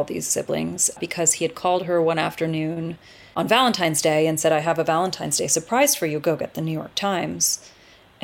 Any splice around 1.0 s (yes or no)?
yes